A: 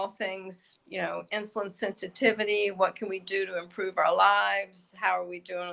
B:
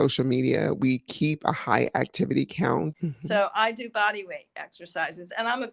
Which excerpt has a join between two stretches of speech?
B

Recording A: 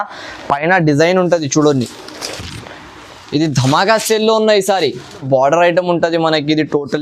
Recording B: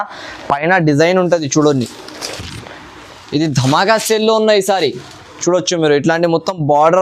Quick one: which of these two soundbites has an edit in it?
A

